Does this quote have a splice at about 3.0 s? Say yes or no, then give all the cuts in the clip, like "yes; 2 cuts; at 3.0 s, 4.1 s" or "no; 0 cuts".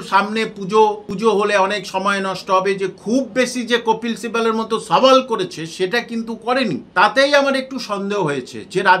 no; 2 cuts; at 1.1 s, 6.9 s